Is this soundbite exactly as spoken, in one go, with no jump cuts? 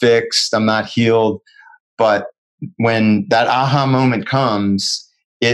no; 1 cut; at 1.7 s

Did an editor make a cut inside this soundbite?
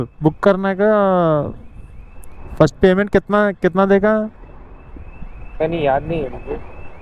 no; 0 cuts

